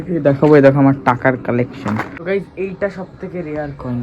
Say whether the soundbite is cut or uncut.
cut